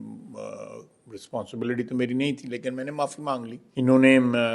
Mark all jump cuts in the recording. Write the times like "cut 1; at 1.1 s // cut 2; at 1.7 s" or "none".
cut 1; at 3.6 s